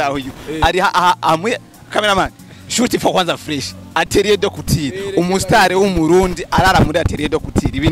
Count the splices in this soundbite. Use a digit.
0